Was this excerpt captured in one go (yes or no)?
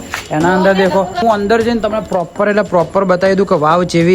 no